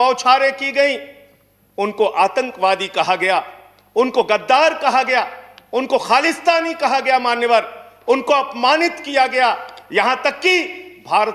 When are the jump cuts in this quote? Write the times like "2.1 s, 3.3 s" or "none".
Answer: none